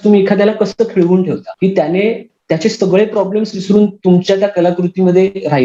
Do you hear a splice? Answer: yes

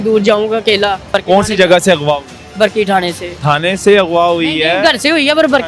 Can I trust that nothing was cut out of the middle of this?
no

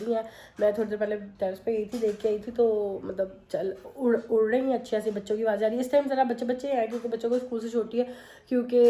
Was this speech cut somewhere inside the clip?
no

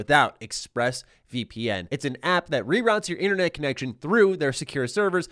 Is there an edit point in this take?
yes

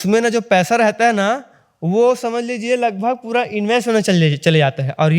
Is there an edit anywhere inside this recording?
no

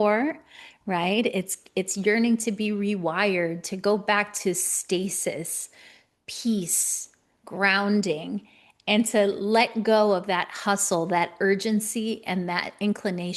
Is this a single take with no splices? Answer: yes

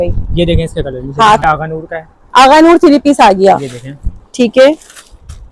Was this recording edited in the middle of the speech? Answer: yes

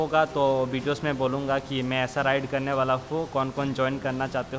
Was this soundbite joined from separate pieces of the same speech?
no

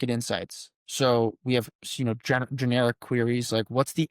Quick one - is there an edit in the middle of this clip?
no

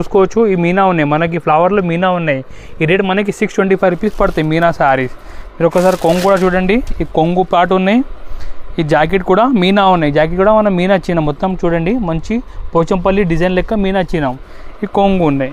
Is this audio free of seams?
yes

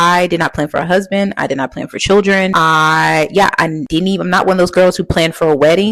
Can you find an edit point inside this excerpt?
no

